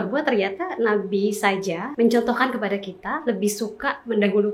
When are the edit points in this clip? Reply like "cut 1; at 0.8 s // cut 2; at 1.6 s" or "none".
cut 1; at 1.9 s